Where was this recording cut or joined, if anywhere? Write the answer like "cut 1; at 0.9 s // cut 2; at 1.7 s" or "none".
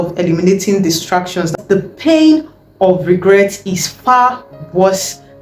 cut 1; at 1.6 s

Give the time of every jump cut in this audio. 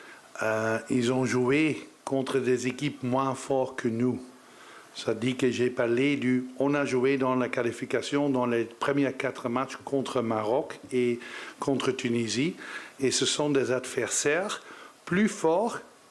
none

